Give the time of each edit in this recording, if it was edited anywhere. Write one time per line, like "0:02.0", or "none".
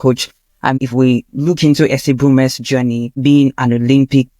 0:00.8
0:03.1